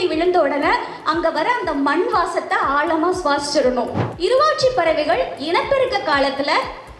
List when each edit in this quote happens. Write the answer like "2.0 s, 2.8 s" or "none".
4.0 s